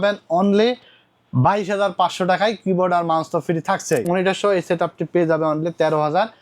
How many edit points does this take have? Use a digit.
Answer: 1